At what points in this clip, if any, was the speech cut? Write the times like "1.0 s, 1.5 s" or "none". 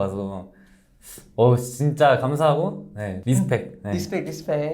3.1 s